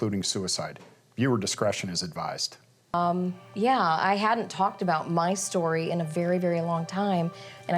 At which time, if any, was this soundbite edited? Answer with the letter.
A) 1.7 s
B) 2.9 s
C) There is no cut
B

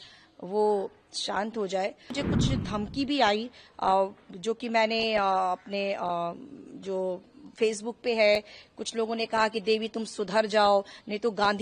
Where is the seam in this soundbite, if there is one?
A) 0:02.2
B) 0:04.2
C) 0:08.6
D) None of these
A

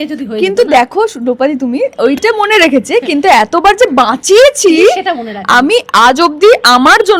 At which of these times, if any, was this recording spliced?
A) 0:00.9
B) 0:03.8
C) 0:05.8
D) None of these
D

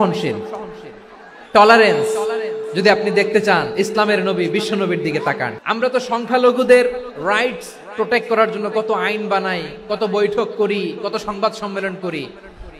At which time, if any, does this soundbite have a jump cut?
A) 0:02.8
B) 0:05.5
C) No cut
B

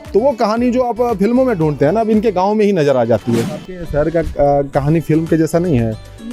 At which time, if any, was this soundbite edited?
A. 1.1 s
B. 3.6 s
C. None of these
B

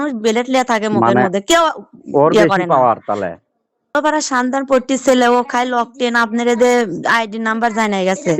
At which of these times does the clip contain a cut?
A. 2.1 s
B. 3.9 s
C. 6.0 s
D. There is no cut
B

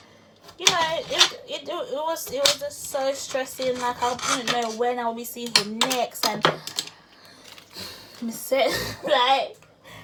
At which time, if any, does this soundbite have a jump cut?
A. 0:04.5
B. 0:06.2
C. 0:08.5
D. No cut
D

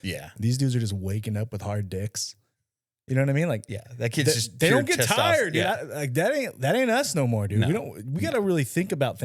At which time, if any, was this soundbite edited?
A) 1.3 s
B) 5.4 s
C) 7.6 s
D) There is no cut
D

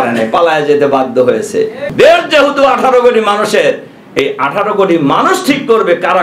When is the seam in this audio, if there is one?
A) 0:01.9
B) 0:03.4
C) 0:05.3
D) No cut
A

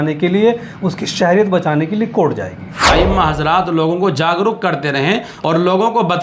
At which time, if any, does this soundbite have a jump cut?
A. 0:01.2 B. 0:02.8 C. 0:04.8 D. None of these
B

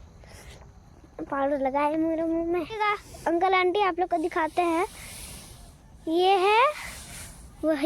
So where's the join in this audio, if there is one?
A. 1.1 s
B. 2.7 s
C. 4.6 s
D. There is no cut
B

